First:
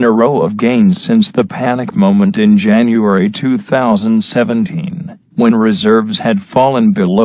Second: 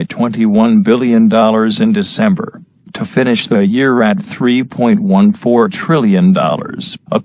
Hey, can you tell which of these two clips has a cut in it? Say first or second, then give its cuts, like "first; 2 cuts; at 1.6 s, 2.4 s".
second; 1 cut; at 6.0 s